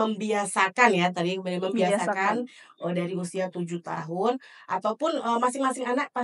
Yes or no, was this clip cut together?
no